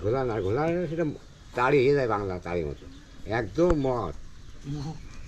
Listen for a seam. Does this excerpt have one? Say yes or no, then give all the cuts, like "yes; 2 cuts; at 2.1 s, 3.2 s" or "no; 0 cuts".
no; 0 cuts